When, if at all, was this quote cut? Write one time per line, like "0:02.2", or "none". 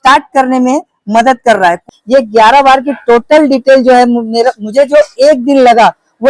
0:01.8